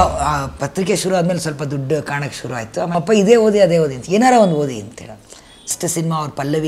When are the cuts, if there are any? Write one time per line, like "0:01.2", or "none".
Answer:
0:02.9
0:05.7